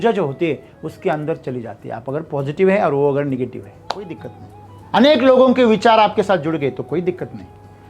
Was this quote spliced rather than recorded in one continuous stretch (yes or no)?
yes